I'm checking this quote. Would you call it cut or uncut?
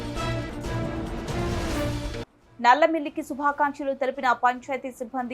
cut